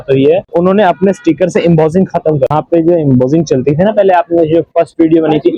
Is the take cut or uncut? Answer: uncut